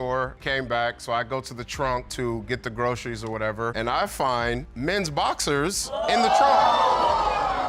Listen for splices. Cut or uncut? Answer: uncut